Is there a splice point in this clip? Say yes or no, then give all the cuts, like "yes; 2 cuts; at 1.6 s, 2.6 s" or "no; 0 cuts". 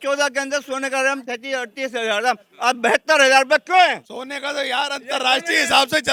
no; 0 cuts